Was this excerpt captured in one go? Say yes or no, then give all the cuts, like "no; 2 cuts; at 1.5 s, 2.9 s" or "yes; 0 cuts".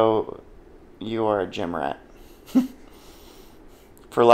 yes; 0 cuts